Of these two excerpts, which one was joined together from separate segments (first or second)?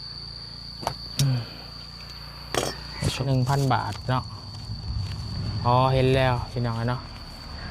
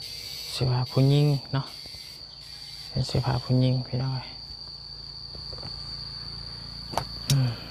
first